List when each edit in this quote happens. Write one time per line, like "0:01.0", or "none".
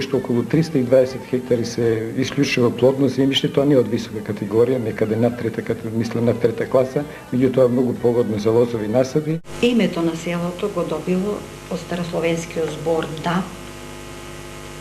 0:09.4